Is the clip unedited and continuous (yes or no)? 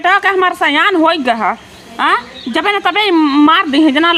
yes